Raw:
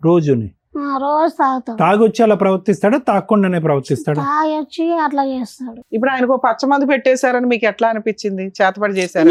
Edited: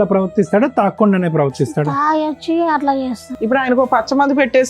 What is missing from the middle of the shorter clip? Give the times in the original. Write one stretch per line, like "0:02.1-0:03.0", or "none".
0:05.6-0:05.8